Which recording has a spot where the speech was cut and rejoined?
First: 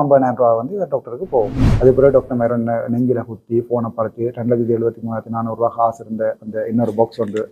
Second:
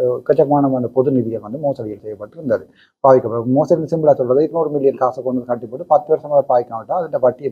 first; 1 cut; at 1.6 s

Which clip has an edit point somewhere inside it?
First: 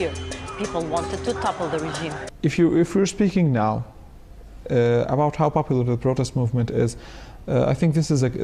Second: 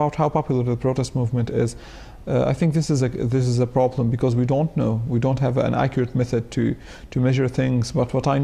first; 1 cut; at 3.8 s

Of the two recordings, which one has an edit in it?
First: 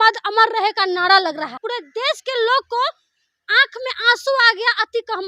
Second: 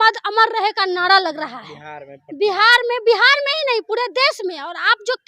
first; 1 cut; at 1.7 s

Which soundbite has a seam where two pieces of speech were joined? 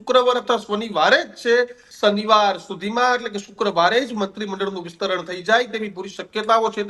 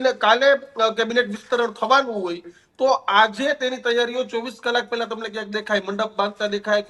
first; 1 cut; at 1.8 s

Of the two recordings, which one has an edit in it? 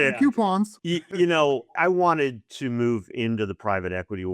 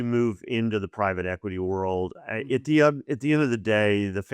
first; 2 cuts; at 1.0 s, 1.7 s

